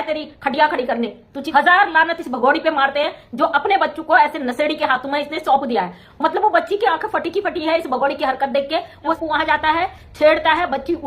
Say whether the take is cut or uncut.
cut